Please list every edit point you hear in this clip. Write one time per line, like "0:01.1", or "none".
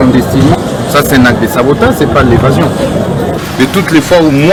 none